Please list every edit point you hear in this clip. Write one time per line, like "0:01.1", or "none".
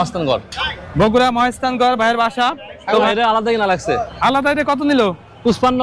0:03.1